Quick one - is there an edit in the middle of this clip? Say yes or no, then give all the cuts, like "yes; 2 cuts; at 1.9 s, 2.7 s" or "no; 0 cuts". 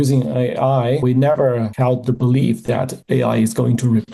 yes; 1 cut; at 1.0 s